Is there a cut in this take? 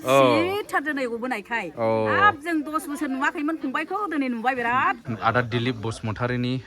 yes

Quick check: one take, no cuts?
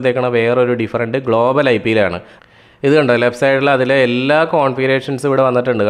no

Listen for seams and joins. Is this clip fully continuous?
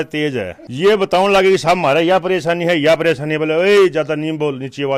yes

